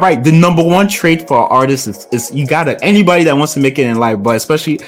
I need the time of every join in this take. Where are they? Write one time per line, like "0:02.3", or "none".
0:02.8